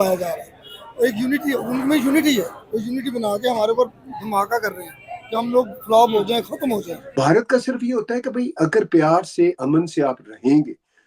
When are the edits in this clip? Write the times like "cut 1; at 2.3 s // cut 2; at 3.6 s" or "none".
cut 1; at 7.1 s